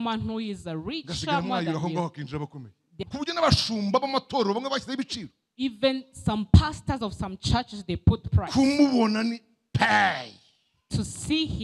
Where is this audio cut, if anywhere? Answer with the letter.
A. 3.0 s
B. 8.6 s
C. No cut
A